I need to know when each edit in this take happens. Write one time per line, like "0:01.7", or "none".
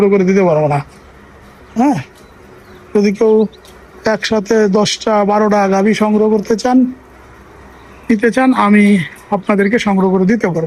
none